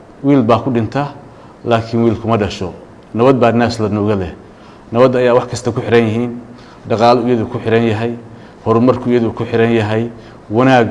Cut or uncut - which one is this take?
uncut